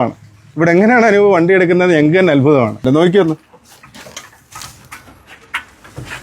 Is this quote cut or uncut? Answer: cut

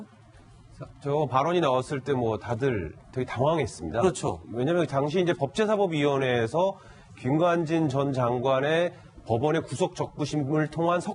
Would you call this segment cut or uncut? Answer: uncut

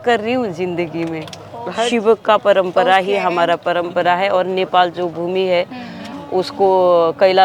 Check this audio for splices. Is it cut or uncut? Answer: cut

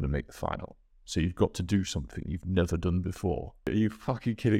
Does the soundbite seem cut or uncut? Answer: cut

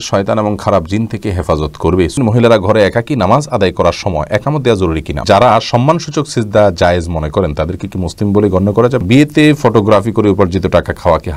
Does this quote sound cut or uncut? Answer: cut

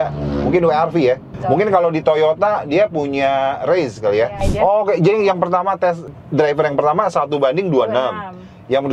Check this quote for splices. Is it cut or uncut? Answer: cut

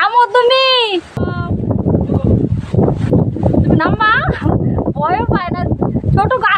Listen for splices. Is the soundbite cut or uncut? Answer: uncut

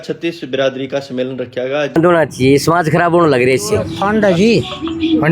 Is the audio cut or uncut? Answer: cut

